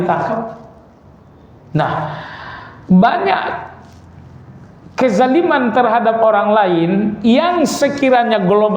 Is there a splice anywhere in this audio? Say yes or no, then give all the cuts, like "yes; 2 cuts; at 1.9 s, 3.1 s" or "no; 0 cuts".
no; 0 cuts